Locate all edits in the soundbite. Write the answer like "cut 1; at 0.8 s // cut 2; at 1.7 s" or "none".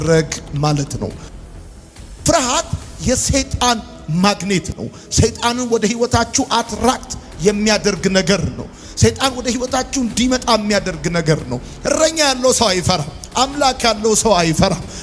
cut 1; at 1.5 s // cut 2; at 11.7 s